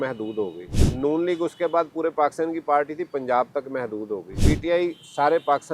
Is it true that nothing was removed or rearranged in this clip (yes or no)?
no